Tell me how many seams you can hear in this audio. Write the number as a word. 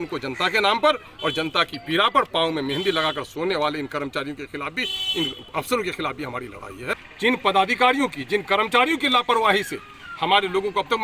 one